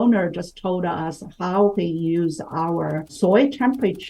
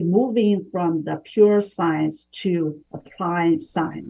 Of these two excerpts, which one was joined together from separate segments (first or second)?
first